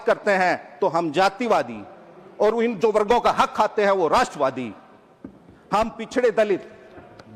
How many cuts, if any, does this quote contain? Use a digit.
0